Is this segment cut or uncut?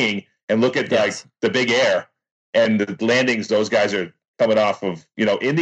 uncut